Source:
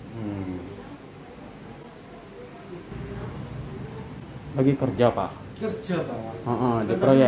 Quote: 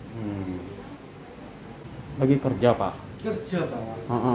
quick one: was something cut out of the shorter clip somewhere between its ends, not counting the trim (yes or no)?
yes